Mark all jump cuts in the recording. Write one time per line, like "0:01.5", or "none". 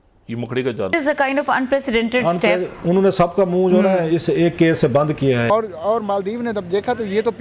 0:00.9
0:05.5